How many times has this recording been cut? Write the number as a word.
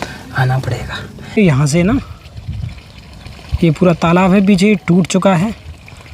one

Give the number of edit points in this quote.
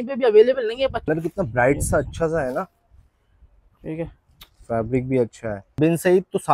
two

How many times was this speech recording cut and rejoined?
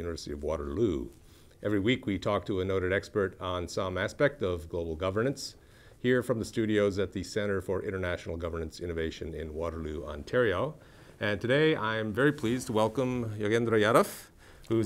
one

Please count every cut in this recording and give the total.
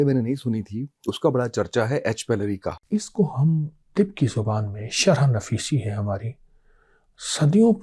one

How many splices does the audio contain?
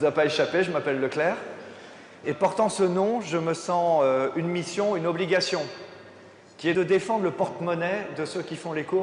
one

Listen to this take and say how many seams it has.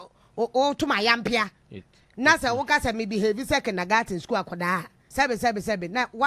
one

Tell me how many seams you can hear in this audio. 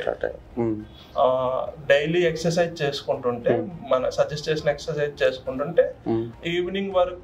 one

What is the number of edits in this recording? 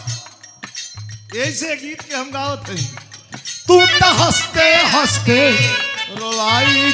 zero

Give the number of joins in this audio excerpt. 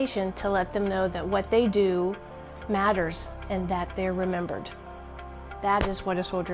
zero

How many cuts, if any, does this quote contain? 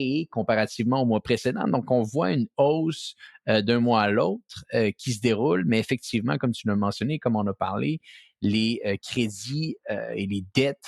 zero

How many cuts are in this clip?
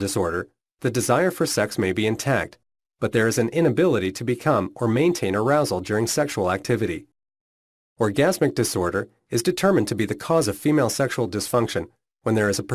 one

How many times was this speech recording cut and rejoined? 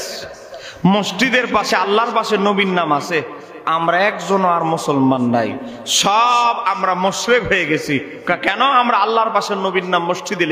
zero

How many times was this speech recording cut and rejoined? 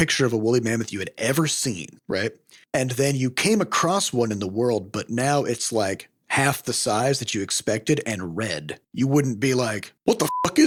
zero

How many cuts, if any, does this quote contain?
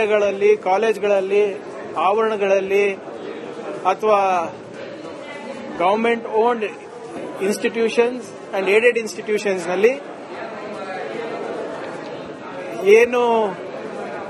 zero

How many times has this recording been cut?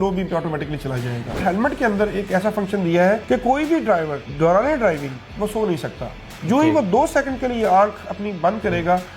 three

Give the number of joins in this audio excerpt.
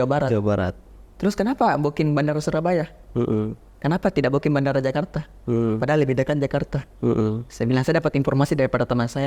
zero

